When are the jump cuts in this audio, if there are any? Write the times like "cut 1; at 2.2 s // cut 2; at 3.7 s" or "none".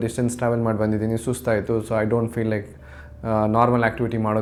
none